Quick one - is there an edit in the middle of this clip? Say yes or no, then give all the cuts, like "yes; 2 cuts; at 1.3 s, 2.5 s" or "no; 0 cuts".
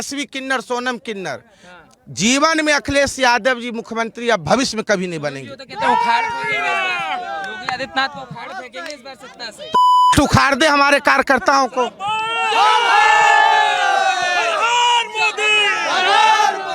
no; 0 cuts